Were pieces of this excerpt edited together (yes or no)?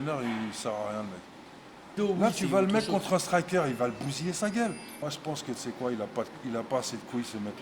yes